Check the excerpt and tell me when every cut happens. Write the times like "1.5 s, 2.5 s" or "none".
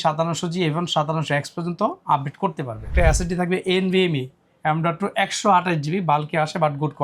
2.9 s